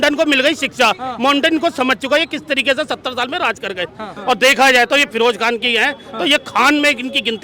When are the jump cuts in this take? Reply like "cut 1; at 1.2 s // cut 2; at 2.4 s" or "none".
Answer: cut 1; at 4.1 s